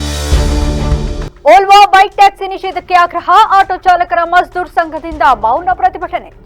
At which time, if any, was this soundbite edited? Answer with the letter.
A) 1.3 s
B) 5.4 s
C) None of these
A